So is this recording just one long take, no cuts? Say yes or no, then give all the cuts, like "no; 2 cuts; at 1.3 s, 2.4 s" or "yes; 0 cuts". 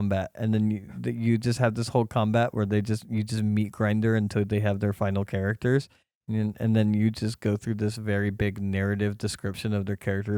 yes; 0 cuts